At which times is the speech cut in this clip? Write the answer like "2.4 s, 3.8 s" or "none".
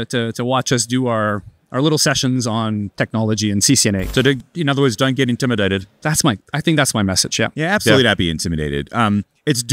4.1 s